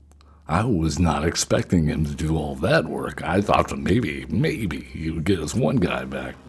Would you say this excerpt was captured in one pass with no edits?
yes; 0 cuts

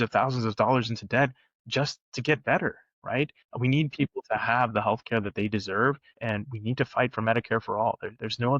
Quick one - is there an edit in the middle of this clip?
yes; 2 cuts; at 3.4 s, 6.1 s

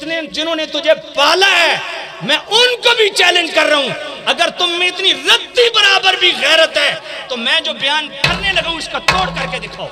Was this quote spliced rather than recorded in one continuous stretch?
no; 0 cuts

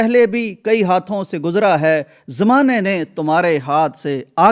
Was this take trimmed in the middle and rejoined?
no; 0 cuts

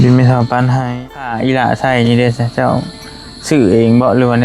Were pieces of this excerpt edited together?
yes; 1 cut; at 1.0 s

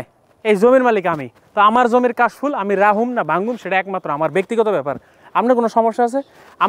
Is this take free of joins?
yes; 0 cuts

